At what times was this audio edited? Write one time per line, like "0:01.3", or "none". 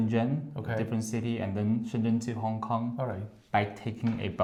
none